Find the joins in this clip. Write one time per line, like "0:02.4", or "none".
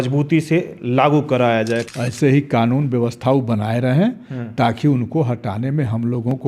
0:01.9

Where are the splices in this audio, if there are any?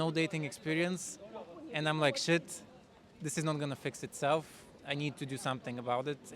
0:04.7

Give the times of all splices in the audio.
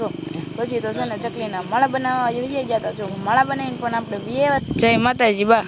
0:04.7

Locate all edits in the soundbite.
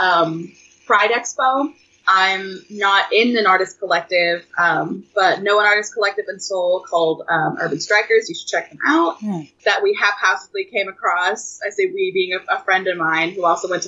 0:01.9
0:09.5

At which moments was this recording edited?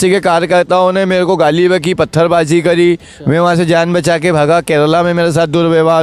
none

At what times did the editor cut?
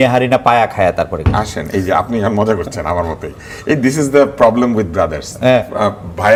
none

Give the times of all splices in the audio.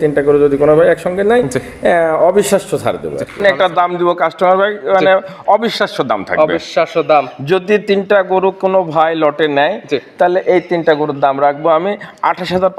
0:03.4

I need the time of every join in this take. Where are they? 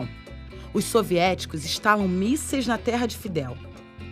0:01.3

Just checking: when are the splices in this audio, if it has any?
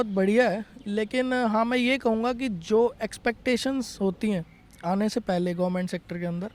none

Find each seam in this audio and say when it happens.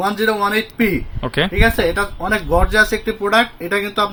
none

